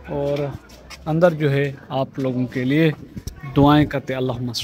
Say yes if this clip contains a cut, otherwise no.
no